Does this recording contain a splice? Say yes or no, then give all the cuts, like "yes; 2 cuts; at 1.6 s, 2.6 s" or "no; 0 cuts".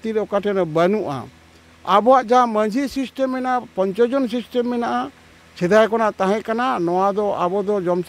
no; 0 cuts